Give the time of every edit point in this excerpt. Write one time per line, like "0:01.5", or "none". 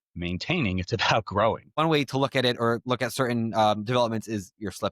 0:01.8